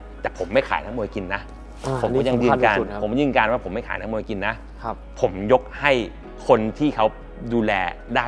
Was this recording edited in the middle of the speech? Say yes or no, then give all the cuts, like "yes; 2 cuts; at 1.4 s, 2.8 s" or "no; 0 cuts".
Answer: no; 0 cuts